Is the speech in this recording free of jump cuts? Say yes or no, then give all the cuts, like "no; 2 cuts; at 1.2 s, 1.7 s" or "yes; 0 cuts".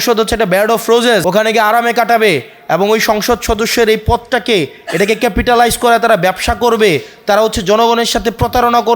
no; 1 cut; at 1.2 s